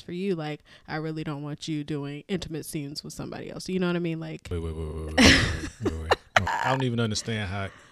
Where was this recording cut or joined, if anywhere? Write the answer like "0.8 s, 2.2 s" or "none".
4.4 s, 6.5 s